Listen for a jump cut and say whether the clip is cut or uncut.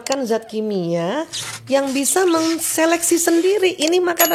uncut